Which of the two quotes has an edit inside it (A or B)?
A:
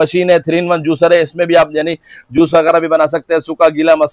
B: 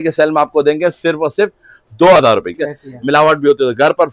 B